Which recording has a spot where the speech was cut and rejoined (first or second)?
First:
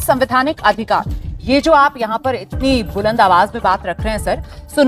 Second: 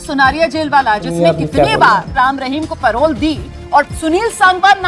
second